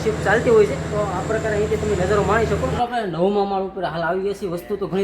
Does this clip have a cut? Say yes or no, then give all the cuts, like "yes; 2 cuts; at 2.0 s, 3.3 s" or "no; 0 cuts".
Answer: yes; 1 cut; at 2.7 s